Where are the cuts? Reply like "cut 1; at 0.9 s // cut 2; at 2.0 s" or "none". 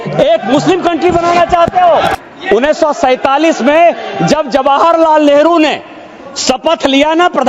cut 1; at 2.1 s